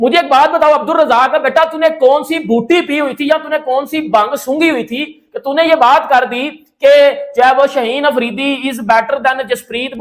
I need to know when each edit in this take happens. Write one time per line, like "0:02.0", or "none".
none